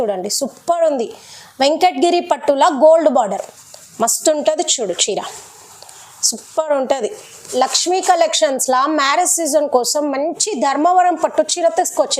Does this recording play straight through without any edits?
no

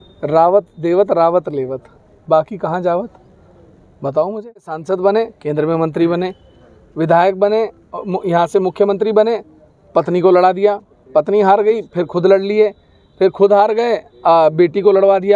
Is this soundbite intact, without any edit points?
yes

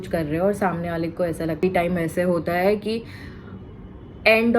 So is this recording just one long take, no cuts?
no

